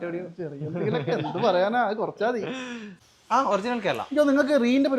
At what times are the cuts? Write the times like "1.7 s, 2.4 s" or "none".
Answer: 3.0 s